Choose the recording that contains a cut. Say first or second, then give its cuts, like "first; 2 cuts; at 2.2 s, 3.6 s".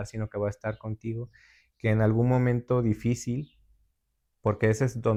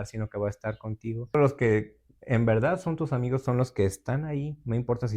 second; 1 cut; at 1.3 s